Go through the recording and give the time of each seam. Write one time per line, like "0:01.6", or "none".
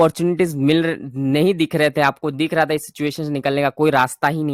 none